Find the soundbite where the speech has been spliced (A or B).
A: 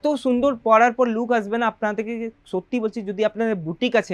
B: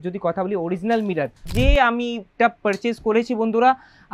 B